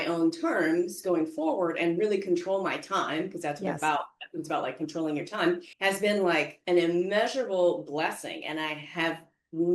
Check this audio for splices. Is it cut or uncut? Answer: cut